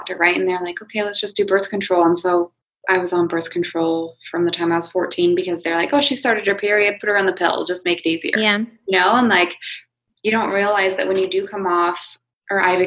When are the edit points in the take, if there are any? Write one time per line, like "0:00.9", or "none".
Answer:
none